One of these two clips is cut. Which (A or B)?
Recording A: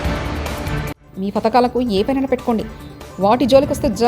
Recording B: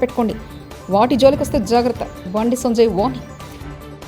A